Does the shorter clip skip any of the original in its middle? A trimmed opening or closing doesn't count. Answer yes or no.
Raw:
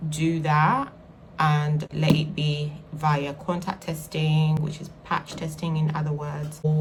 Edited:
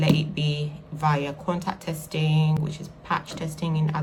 no